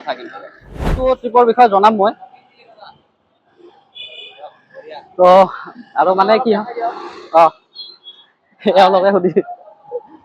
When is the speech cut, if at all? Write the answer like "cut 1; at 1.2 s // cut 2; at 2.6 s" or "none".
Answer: cut 1; at 1.0 s